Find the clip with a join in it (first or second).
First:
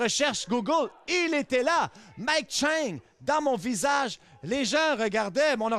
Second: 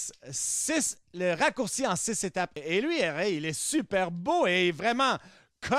second